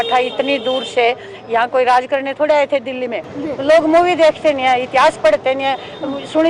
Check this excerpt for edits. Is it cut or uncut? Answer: cut